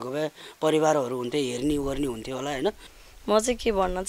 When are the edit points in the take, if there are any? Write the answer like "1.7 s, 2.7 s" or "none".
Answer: 2.9 s

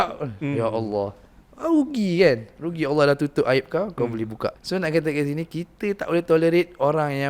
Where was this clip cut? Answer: 4.6 s

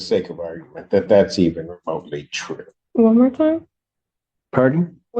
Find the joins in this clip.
2.8 s

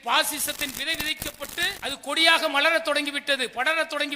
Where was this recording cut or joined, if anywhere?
1.8 s

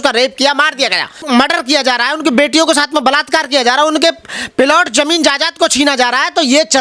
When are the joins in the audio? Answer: 1.1 s

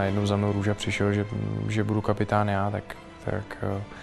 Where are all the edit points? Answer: none

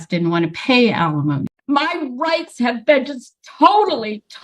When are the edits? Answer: 1.5 s

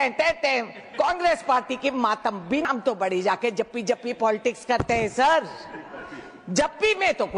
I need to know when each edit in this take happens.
2.6 s

